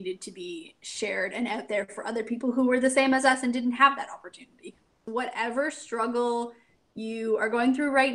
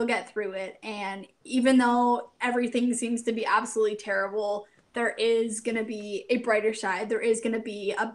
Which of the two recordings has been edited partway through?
first; 1 cut; at 5.1 s

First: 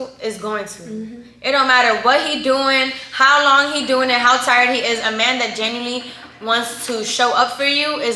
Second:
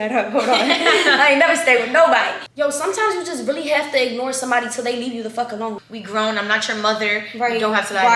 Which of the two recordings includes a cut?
second; 2 cuts; at 2.4 s, 5.8 s

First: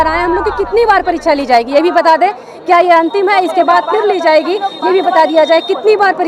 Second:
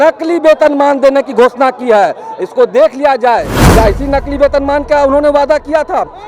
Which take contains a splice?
second; 1 cut; at 3.6 s

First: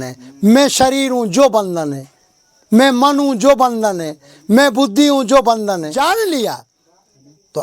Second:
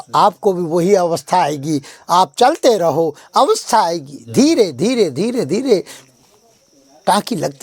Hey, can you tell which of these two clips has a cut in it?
first; 1 cut; at 6.0 s

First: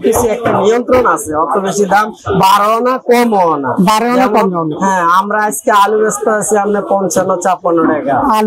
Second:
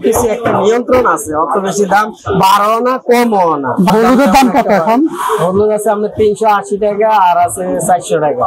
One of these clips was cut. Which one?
second; 1 cut; at 3.9 s

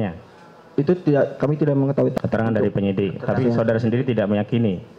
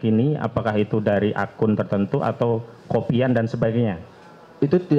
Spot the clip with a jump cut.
first; 1 cut; at 2.1 s

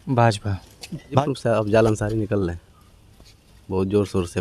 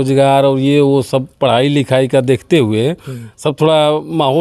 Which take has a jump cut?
first; 1 cut; at 1.2 s

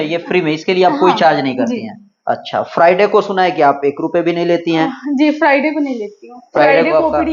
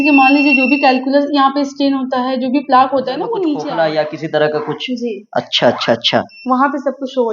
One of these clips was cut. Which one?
second; 1 cut; at 3.6 s

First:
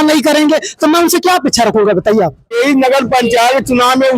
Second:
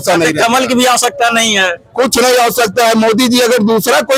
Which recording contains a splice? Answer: first; 1 cut; at 2.5 s

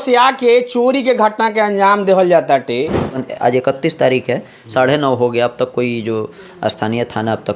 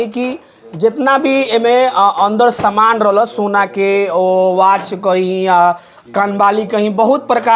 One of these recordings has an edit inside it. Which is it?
first; 1 cut; at 3.2 s

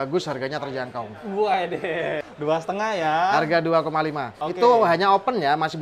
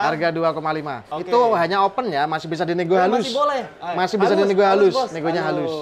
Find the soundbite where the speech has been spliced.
first; 1 cut; at 2.2 s

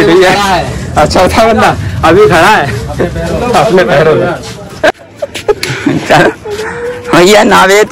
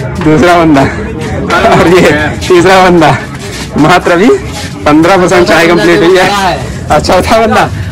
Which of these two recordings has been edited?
first; 1 cut; at 4.9 s

